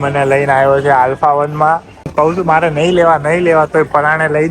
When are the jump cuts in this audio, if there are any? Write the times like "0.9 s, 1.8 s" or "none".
2.0 s